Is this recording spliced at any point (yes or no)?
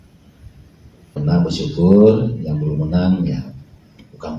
yes